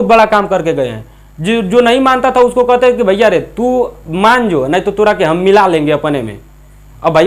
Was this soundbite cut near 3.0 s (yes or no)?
no